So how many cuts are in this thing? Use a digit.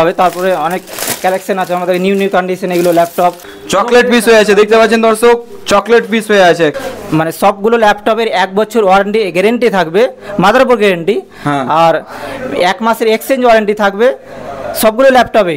2